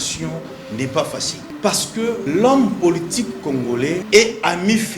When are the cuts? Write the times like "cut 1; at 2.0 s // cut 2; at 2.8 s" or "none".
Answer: cut 1; at 1.4 s // cut 2; at 2.2 s // cut 3; at 4.0 s